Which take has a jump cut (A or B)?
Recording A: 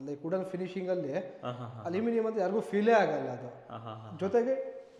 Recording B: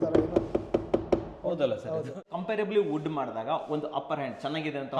B